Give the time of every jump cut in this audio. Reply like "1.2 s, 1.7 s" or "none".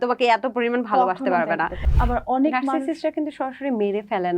1.8 s